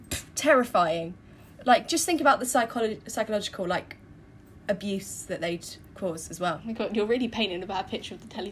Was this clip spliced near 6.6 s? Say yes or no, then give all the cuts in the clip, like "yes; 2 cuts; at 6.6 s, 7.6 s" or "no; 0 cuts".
yes; 1 cut; at 6.6 s